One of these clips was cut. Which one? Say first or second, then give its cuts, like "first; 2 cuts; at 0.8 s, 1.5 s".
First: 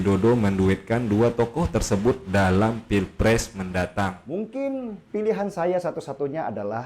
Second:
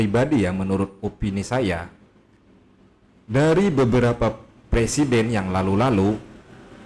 first; 1 cut; at 4.2 s